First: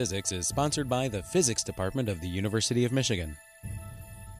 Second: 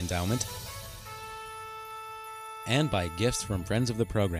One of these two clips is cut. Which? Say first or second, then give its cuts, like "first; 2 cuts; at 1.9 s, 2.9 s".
first; 1 cut; at 3.5 s